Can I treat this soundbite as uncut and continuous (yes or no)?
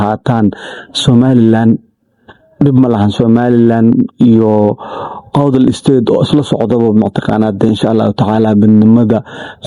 yes